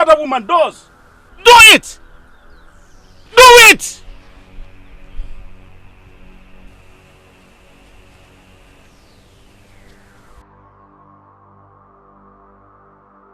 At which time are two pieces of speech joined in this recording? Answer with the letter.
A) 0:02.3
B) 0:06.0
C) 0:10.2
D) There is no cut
D